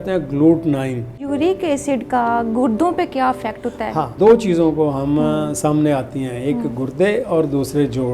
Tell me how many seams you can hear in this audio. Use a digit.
2